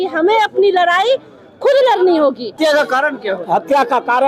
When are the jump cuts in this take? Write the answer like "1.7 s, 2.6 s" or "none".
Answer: 2.5 s